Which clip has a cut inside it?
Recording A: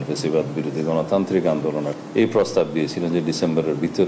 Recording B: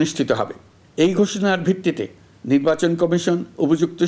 A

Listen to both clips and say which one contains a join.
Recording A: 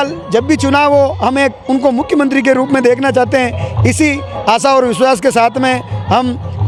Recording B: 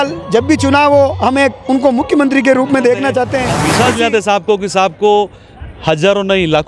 B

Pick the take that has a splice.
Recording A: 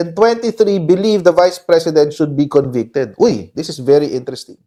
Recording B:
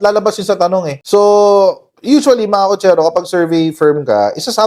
B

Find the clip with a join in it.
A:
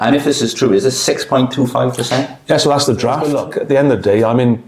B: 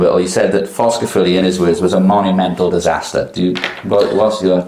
A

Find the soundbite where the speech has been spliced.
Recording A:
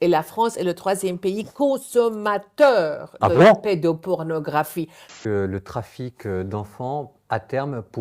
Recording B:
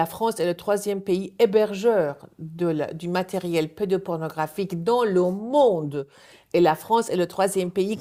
A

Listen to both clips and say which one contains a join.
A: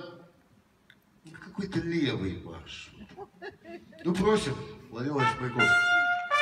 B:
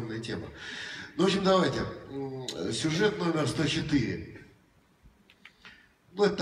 B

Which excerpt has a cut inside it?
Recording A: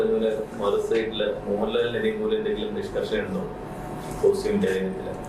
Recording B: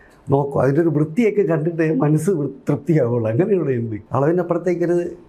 B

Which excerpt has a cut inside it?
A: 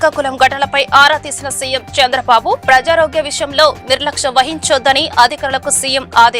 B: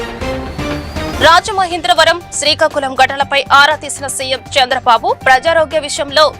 B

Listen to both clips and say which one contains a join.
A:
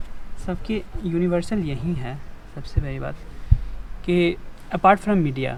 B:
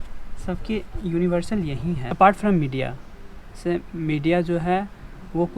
B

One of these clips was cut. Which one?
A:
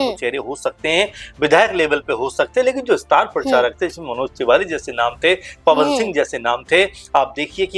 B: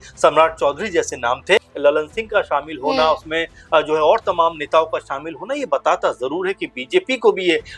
B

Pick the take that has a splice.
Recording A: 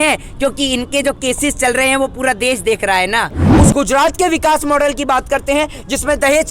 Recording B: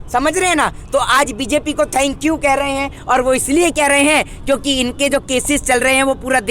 A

